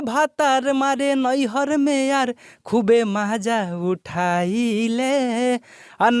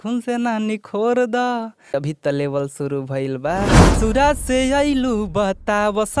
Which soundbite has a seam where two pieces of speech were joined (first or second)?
second